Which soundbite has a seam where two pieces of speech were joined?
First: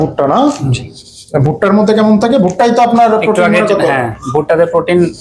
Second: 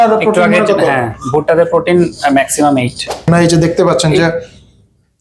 second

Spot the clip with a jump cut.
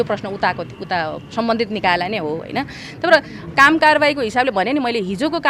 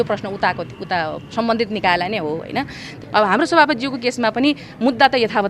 second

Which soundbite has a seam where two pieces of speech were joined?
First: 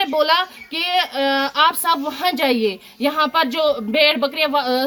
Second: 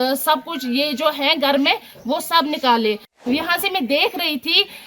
second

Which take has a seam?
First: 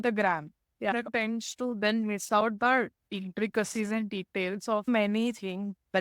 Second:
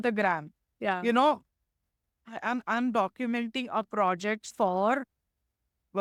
first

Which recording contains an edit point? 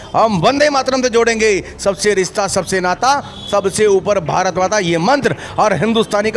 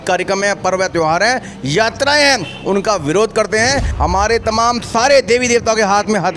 second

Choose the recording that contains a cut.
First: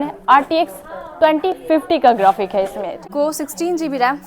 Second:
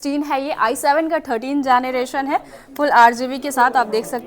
first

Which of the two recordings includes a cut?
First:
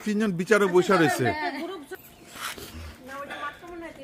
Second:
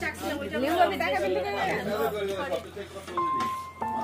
first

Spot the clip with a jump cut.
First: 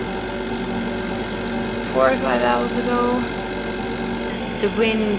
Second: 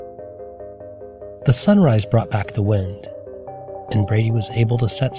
first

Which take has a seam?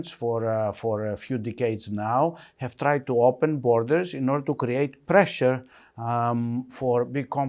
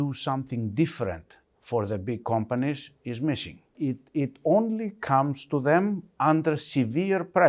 second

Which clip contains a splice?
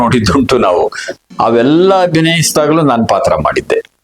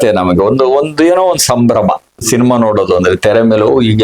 first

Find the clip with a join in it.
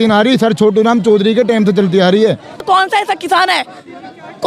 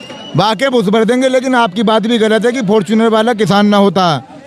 first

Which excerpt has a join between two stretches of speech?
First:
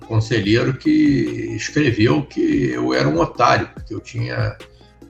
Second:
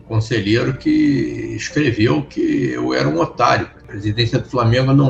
second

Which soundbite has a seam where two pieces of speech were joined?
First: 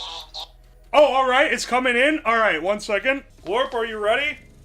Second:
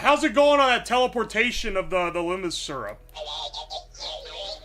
first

